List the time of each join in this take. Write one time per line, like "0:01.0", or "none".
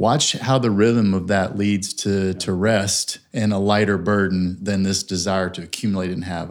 none